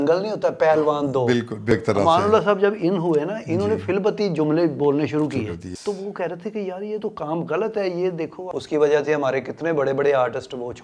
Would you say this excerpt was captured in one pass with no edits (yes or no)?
no